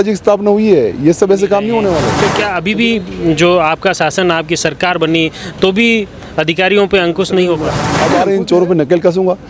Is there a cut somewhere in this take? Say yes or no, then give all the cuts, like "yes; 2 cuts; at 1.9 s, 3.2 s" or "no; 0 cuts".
yes; 2 cuts; at 2.2 s, 8.0 s